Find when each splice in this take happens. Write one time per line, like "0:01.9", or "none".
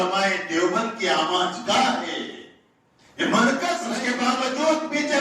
0:03.9